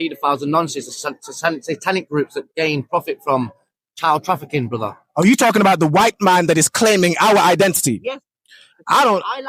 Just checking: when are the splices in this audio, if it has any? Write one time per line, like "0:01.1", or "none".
none